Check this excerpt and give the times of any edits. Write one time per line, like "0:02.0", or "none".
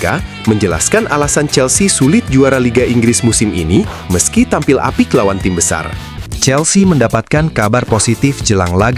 0:06.2